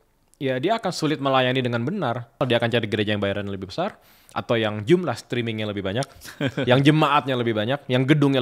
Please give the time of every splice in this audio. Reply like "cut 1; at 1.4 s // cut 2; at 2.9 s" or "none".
cut 1; at 2.4 s